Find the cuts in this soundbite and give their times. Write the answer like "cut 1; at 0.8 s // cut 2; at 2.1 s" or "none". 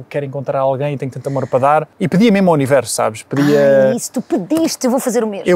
cut 1; at 2.0 s